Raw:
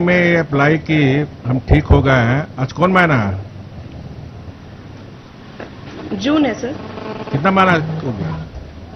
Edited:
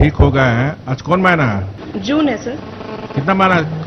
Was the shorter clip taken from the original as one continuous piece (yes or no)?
no